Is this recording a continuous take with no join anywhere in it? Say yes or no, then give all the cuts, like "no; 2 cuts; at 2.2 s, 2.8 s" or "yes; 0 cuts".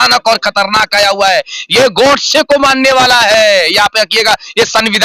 yes; 0 cuts